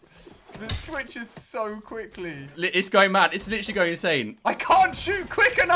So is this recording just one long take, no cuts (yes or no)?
no